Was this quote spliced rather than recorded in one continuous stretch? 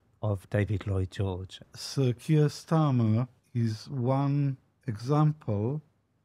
yes; 2 cuts; at 1.5 s, 3.4 s

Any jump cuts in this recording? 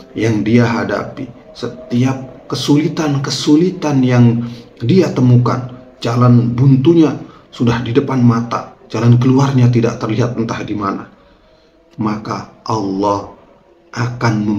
no; 0 cuts

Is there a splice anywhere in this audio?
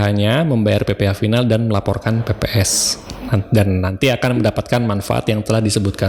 no; 0 cuts

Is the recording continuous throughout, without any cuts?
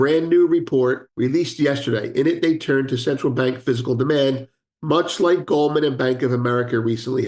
no; 1 cut; at 1.1 s

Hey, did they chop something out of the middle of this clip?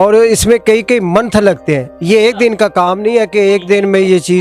no; 0 cuts

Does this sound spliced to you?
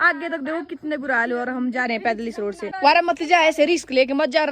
yes; 1 cut; at 2.7 s

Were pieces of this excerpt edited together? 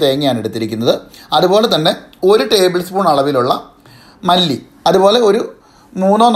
yes; 1 cut; at 4.7 s

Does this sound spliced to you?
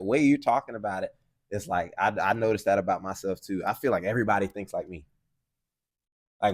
no; 0 cuts

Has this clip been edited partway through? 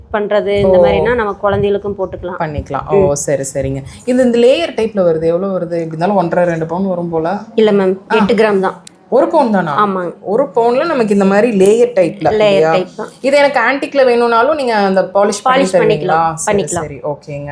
no; 0 cuts

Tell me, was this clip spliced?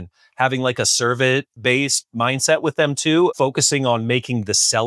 yes; 2 cuts; at 1.5 s, 3.3 s

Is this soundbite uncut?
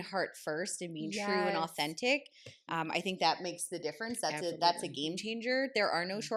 yes; 0 cuts

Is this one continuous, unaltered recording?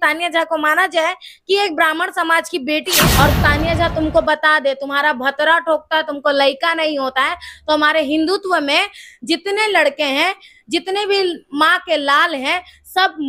no; 1 cut; at 2.9 s

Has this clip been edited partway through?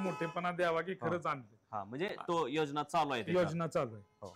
no; 0 cuts

